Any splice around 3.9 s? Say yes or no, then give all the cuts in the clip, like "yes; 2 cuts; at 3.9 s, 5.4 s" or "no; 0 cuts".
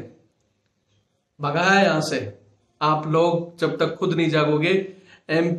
no; 0 cuts